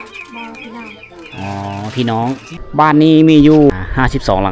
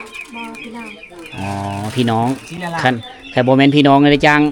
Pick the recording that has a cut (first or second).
first